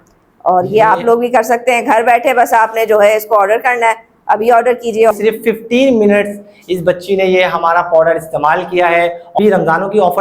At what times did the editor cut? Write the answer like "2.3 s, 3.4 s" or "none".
5.1 s, 9.4 s